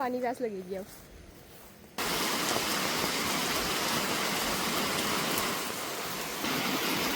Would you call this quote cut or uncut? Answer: uncut